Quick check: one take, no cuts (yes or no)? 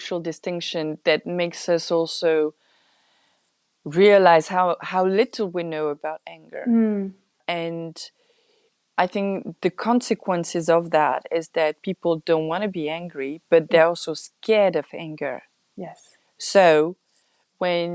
no